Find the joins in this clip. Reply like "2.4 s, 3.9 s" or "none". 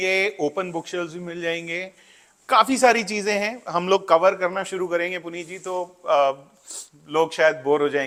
none